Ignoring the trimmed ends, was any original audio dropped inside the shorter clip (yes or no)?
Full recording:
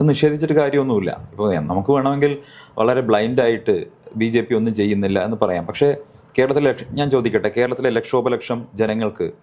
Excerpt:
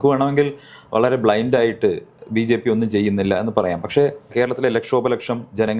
yes